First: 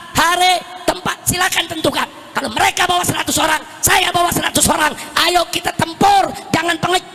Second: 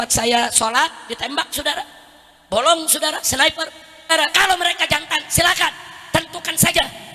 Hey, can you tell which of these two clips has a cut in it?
second; 1 cut; at 4.1 s

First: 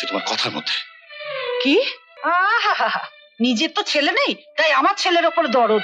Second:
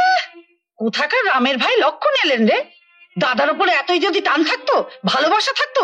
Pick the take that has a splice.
first; 1 cut; at 2.1 s

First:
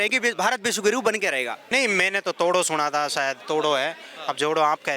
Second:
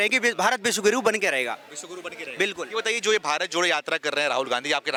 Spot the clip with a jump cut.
first; 1 cut; at 1.6 s

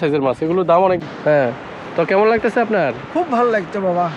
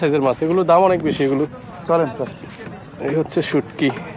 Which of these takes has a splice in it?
first; 1 cut; at 1.0 s

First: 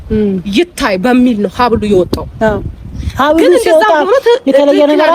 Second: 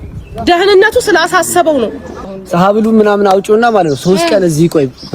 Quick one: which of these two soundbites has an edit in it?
second; 1 cut; at 2.1 s

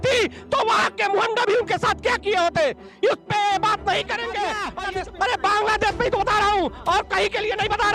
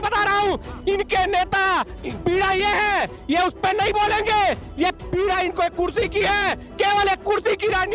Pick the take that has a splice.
first; 1 cut; at 4.7 s

